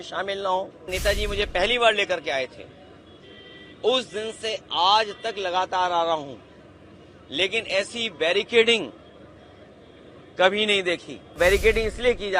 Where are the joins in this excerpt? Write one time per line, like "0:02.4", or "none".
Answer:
0:00.9
0:11.4